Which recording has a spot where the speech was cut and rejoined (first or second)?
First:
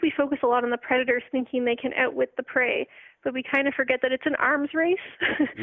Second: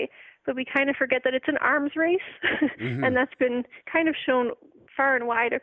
second